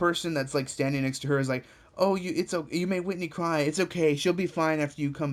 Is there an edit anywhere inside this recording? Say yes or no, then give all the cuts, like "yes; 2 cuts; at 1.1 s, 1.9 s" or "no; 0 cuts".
no; 0 cuts